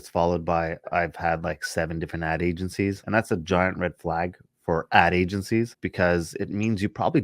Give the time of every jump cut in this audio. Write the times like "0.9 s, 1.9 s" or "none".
3.0 s, 5.8 s